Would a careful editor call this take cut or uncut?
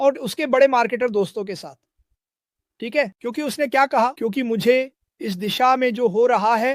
uncut